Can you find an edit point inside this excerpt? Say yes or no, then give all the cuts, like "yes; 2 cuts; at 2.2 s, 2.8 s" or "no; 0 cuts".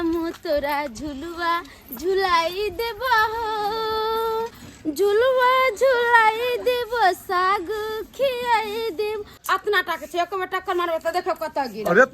yes; 2 cuts; at 4.6 s, 9.3 s